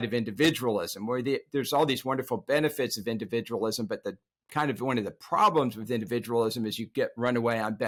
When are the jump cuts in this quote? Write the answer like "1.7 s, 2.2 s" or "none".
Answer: none